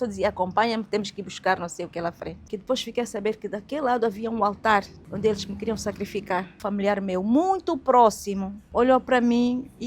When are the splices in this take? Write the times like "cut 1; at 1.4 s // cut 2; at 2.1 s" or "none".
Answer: cut 1; at 2.3 s // cut 2; at 5.0 s // cut 3; at 6.6 s // cut 4; at 8.5 s